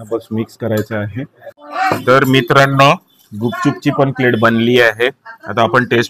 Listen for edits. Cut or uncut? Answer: cut